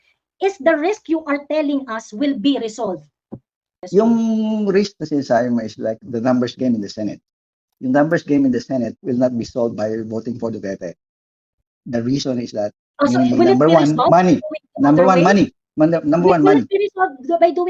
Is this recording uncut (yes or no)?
no